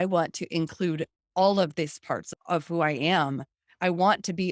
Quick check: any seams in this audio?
yes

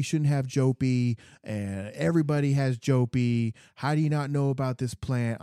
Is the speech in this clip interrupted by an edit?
no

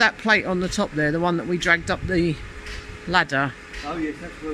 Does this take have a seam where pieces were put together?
no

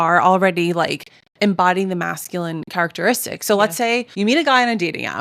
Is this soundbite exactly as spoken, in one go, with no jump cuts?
no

